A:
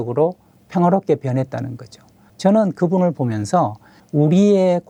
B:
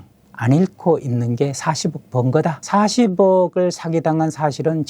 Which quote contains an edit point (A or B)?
B